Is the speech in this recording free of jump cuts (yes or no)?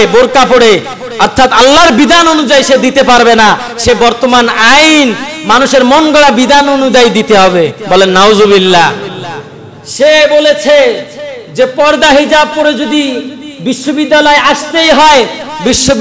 yes